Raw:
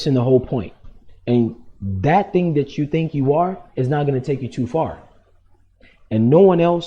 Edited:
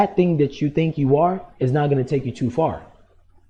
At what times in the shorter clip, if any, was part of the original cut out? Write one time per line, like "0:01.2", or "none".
none